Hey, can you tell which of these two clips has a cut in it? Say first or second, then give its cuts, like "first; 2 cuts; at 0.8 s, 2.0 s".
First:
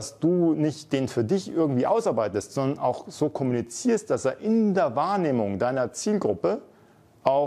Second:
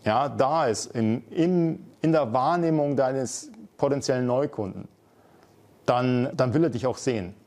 second; 1 cut; at 6.3 s